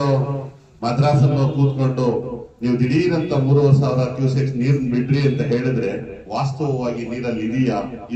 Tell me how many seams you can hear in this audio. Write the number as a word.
zero